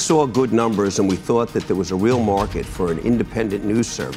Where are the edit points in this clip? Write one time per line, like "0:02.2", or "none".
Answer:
none